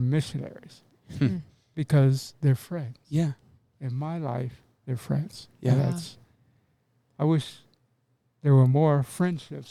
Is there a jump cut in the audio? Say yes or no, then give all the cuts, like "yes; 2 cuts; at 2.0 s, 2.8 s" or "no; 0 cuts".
no; 0 cuts